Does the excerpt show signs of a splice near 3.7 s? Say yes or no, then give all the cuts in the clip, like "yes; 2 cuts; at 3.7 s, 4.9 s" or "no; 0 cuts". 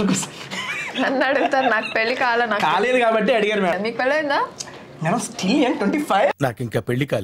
yes; 2 cuts; at 3.7 s, 6.3 s